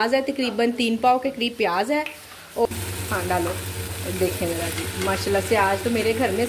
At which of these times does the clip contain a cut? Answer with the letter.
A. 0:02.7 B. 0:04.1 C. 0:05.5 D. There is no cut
A